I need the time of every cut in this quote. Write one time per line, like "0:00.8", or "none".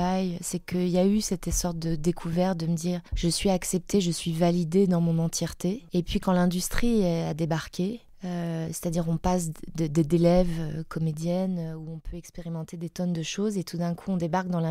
0:03.1
0:05.8
0:08.1